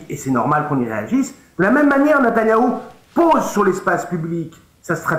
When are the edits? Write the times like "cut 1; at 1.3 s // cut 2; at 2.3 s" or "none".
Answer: none